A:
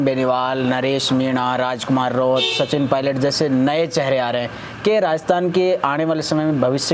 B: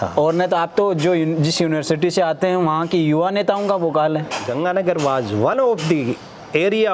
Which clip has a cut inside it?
B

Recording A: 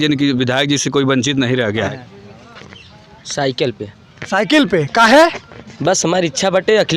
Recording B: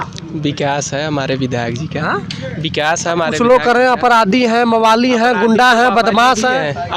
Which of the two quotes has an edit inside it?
A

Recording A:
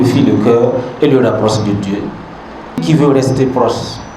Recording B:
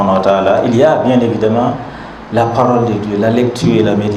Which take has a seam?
A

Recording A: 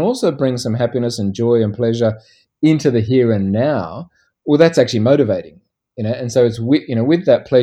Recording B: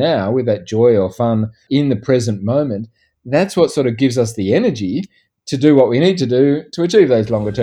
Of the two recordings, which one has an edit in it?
B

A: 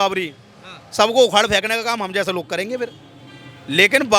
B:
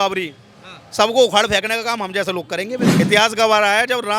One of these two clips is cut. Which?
B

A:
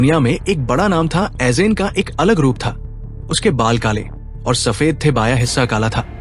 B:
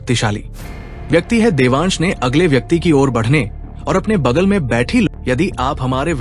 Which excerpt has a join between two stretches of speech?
B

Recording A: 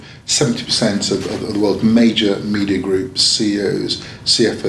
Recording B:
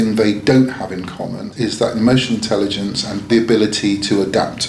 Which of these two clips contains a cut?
B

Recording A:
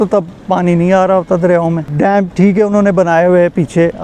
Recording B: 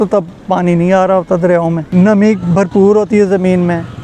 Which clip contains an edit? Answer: B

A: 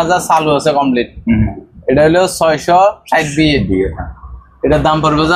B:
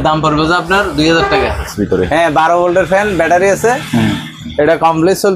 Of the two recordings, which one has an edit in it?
B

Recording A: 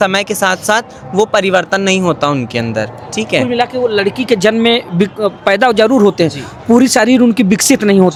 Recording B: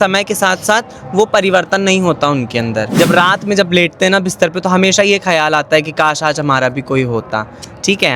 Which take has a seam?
B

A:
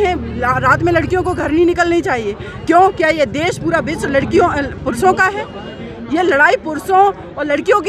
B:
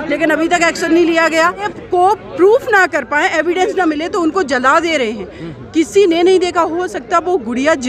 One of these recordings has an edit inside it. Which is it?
B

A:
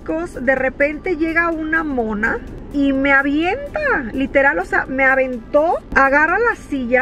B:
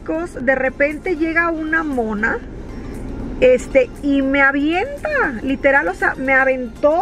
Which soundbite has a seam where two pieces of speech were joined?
A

